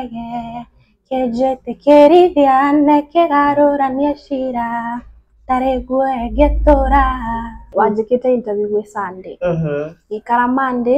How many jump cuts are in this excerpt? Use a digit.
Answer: 1